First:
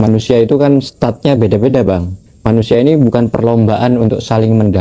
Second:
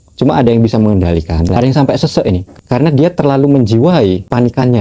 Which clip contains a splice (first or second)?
second